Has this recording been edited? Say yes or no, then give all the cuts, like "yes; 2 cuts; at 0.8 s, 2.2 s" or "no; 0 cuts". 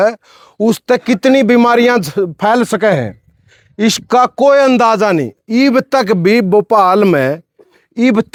no; 0 cuts